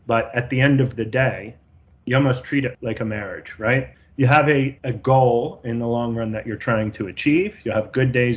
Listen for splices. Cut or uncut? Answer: cut